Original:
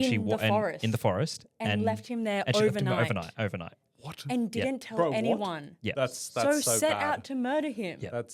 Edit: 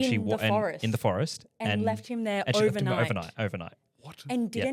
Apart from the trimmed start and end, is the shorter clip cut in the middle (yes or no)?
no